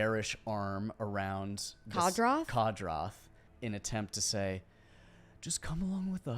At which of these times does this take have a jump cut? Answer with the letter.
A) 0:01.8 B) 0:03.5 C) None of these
B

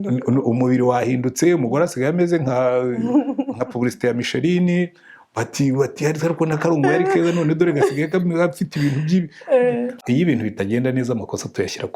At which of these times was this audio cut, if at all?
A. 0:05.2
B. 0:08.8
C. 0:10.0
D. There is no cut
C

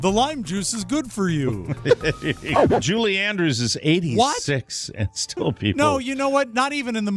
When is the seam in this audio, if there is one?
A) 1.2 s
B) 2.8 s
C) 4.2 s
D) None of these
B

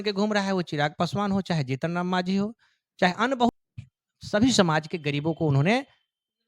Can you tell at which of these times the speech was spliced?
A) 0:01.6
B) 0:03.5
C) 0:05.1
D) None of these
B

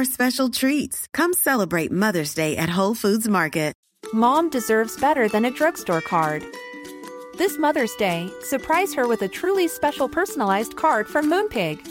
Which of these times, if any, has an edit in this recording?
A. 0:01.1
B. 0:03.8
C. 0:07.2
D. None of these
B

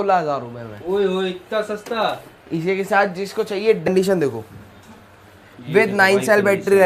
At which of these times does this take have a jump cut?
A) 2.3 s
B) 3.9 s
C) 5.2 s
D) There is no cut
B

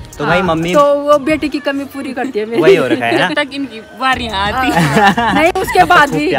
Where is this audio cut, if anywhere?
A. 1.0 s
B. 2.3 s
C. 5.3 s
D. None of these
D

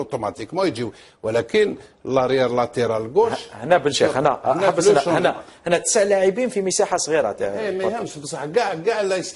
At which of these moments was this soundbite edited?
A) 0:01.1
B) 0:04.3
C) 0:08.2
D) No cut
B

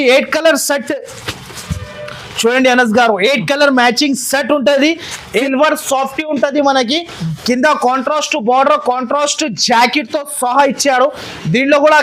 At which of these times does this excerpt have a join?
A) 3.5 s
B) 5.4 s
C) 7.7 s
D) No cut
B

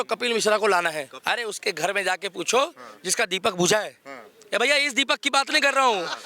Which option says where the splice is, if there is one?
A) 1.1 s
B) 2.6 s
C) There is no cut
A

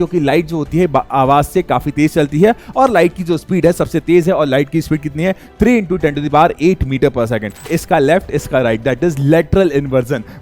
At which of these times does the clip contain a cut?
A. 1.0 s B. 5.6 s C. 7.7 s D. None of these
C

